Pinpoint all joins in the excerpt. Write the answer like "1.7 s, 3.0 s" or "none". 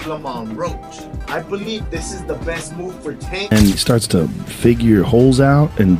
3.5 s